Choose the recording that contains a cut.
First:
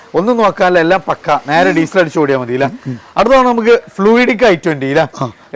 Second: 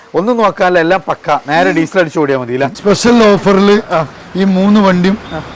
second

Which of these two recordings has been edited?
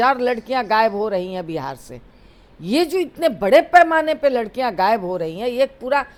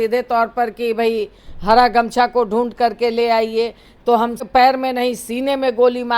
second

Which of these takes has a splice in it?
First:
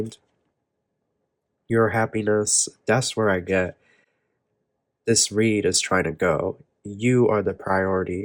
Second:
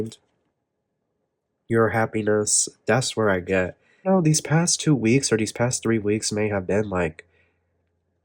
second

